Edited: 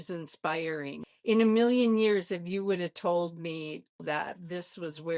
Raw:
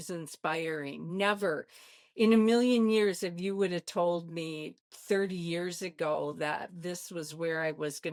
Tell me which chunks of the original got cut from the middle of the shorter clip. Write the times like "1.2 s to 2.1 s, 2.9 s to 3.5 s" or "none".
1.0 s to 1.9 s, 4.9 s to 6.4 s

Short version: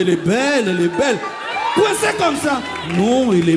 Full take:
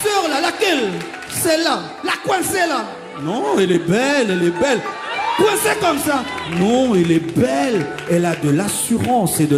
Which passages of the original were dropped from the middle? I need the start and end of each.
none

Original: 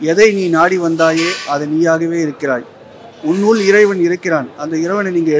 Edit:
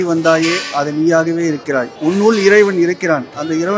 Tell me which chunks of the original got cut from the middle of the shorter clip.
2.7 s to 3.1 s

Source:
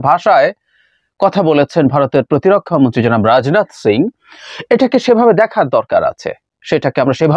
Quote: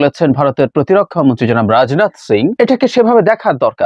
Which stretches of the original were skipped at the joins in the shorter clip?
4.1 s to 4.6 s

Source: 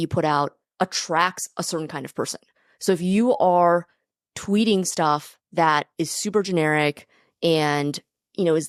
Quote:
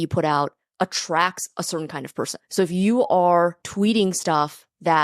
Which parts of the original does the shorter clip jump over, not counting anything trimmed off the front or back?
2.4 s to 2.7 s, 3.9 s to 4.3 s

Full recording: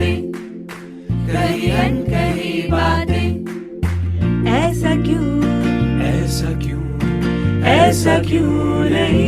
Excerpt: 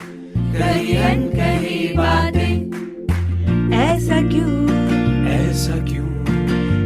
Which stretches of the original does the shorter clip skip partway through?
none

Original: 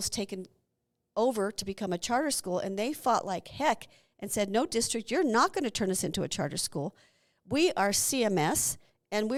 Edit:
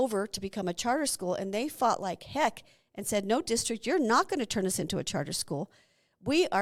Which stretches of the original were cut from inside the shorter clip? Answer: none

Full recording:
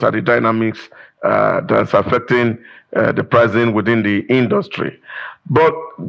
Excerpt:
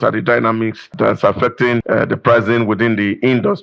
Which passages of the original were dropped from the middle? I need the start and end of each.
0.9 s to 1.6 s, 2.5 s to 2.9 s

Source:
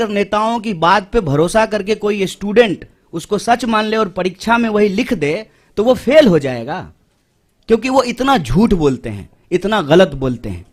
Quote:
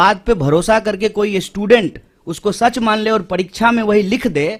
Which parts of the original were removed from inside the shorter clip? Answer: none

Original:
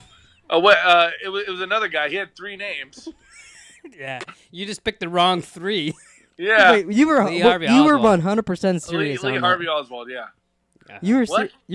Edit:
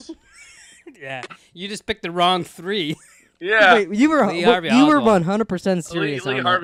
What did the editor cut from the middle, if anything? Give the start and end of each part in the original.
none

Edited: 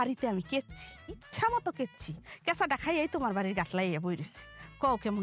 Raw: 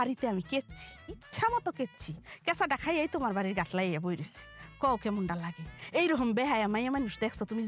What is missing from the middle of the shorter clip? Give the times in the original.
none

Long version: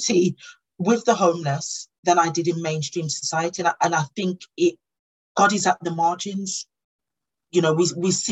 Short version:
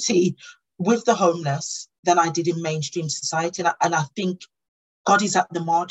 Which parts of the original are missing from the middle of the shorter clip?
4.5 s to 4.8 s

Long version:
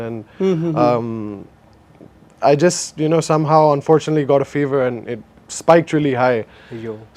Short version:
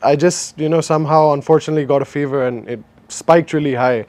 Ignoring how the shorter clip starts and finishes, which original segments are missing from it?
none

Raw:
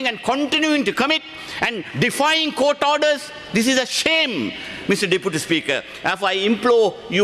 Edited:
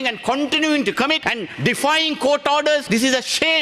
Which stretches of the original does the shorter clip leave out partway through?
1.3 s to 1.6 s, 3.2 s to 3.5 s

